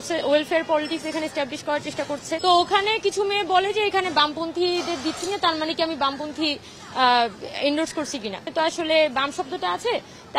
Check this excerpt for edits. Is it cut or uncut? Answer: cut